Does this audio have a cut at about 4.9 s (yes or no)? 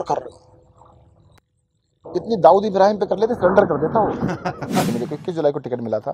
yes